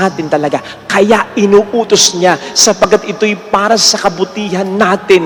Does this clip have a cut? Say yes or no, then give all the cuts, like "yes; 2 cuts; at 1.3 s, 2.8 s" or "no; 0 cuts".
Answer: no; 0 cuts